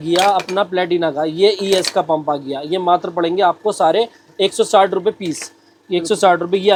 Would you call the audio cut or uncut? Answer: uncut